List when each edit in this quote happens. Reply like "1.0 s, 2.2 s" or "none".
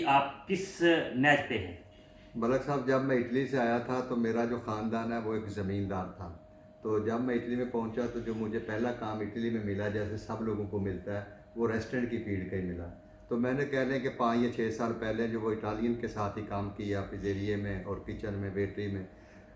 none